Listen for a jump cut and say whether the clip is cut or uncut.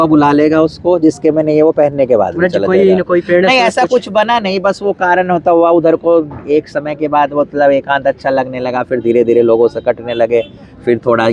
uncut